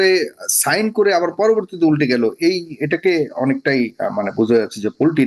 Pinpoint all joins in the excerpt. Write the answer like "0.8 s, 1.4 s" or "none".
none

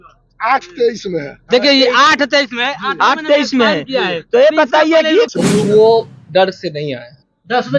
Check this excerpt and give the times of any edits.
5.3 s

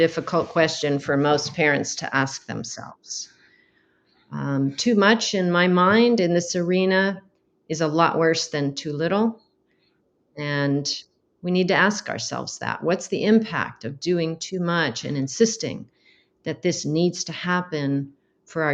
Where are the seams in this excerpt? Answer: none

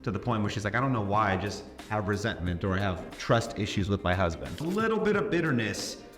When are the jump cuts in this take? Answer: 4.5 s

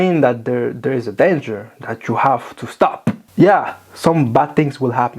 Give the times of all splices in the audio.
3.2 s

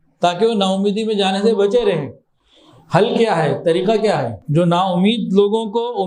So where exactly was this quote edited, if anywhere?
4.4 s

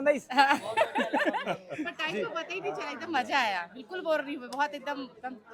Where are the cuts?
none

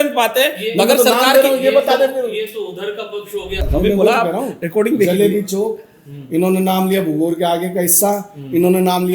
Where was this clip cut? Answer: 3.7 s

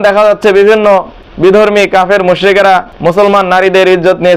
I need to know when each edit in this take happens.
1.2 s, 2.6 s

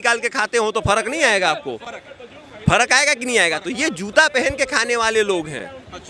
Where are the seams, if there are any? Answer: none

